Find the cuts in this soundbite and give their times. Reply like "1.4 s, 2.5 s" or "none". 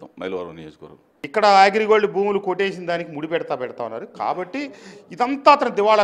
1.2 s

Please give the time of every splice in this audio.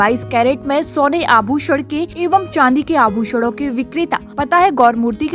2.1 s, 4.3 s

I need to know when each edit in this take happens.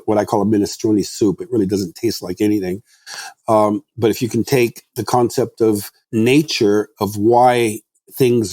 5.9 s

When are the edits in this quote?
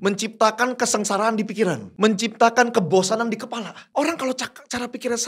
1.9 s, 3.8 s

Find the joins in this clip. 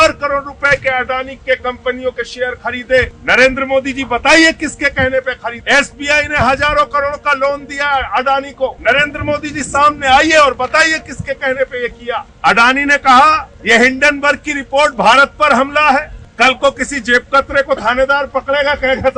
3.2 s, 5.6 s, 8.8 s, 12.3 s, 13.5 s, 16.2 s

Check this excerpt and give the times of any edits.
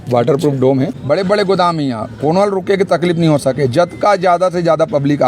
1.0 s

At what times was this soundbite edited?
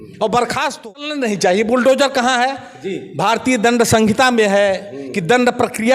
1.1 s

